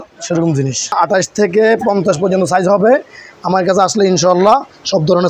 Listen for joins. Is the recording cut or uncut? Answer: cut